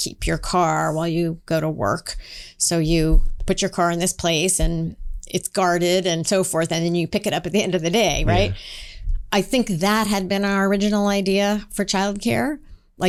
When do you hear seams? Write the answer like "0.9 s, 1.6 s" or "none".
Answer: none